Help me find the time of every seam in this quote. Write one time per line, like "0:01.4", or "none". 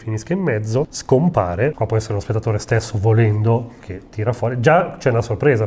0:01.0
0:01.7